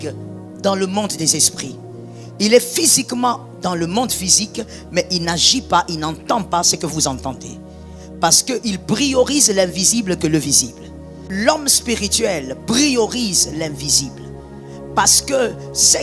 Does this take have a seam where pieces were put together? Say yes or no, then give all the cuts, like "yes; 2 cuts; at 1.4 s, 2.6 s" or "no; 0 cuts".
yes; 1 cut; at 11.3 s